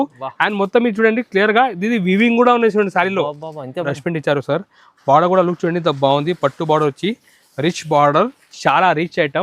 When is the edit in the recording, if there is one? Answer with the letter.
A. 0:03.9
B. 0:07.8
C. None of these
A